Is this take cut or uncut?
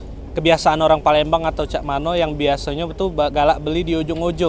uncut